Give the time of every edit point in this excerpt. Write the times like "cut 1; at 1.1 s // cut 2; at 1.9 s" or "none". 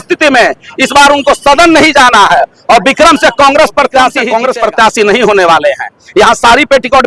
cut 1; at 4.2 s

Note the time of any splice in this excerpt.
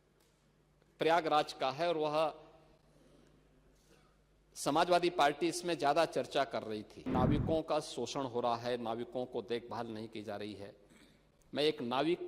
cut 1; at 7.1 s

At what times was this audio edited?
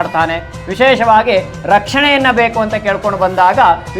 none

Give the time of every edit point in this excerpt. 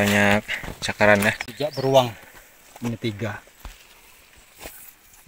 cut 1; at 1.5 s

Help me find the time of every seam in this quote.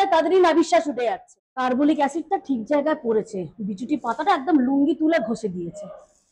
cut 1; at 0.9 s

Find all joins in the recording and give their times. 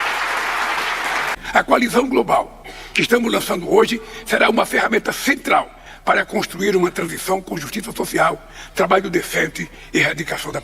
cut 1; at 1.4 s

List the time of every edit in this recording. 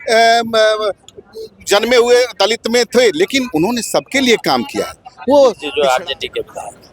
cut 1; at 5.7 s

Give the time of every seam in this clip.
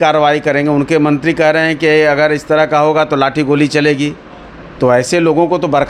none

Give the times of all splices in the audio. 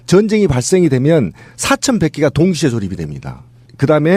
cut 1; at 2.7 s

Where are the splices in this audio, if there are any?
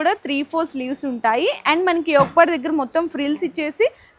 none

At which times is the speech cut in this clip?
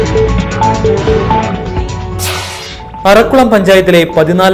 cut 1; at 2.6 s

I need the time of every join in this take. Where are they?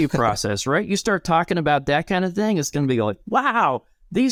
none

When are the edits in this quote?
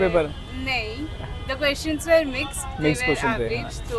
none

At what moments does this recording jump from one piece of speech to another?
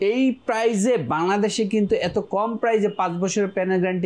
none

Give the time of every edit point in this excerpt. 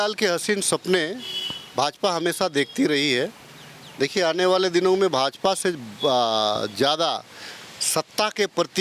none

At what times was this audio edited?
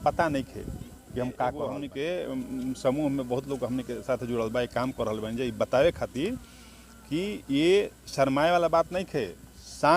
cut 1; at 1.8 s

